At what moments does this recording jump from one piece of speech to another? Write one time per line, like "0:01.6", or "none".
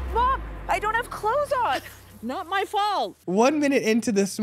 0:03.2